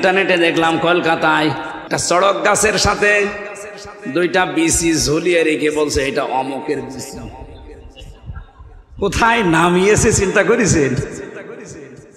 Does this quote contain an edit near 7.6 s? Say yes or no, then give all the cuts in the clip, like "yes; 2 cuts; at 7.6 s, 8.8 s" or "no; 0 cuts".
no; 1 cut; at 1.7 s